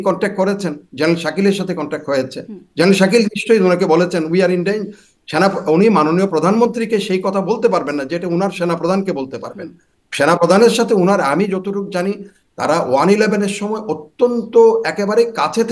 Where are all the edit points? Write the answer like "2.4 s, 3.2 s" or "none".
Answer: none